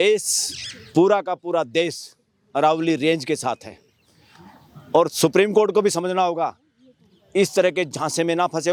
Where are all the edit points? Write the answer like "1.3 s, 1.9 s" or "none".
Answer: none